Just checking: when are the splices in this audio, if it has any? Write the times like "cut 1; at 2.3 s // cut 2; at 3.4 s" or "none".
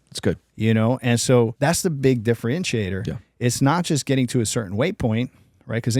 cut 1; at 1.5 s

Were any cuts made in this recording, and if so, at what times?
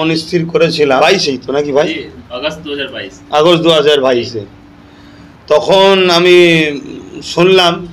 cut 1; at 1.0 s

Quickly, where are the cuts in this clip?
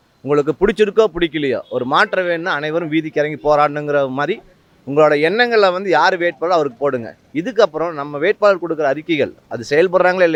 none

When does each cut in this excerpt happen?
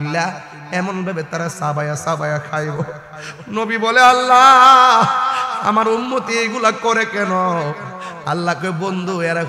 none

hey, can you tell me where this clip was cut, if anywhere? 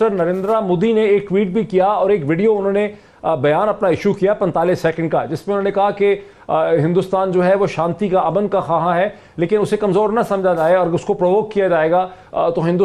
none

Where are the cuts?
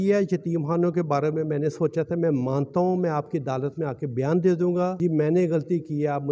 cut 1; at 4.9 s

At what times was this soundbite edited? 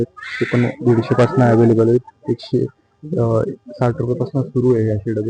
none

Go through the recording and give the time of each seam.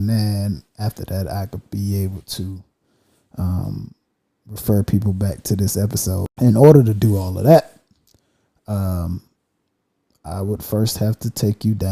cut 1; at 6.2 s

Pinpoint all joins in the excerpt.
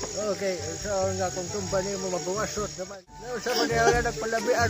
cut 1; at 3.2 s

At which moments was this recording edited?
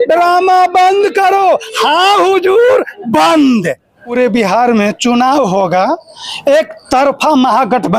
none

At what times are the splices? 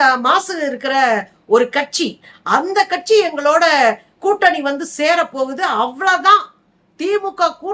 none

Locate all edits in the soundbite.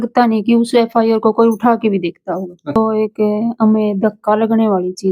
cut 1; at 2.8 s

